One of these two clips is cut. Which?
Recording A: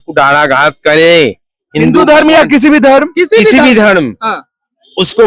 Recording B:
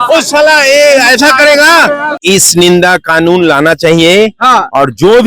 B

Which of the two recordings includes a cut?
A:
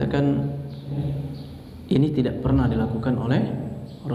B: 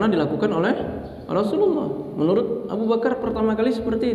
A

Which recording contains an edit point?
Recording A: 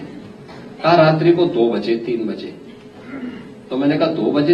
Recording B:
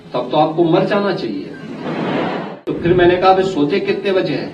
B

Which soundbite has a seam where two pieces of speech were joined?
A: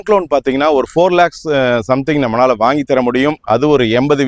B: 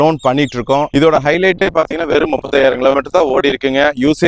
B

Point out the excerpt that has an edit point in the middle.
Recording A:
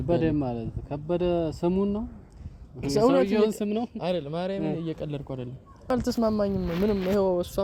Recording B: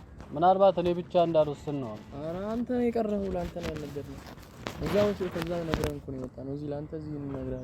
A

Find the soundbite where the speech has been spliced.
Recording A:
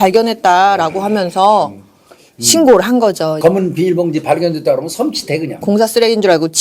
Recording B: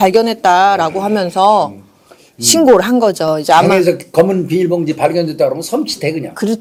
A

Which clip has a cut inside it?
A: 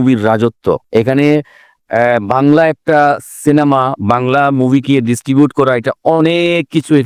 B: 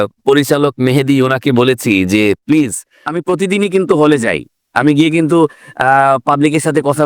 B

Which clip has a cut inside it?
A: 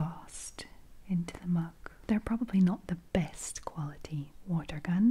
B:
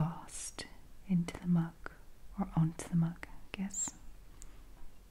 A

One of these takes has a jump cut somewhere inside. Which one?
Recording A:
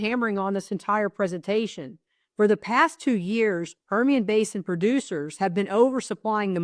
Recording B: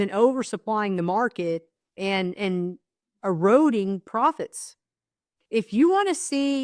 B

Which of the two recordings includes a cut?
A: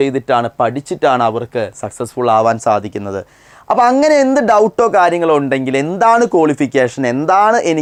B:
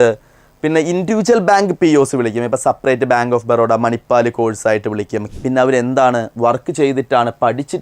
B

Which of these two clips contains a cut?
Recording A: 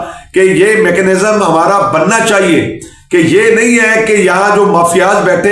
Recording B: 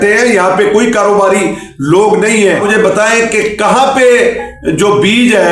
B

